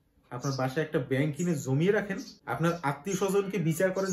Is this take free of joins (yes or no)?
no